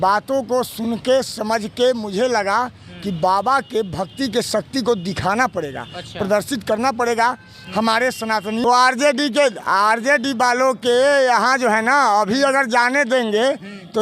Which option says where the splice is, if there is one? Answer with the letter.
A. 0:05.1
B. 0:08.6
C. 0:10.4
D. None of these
B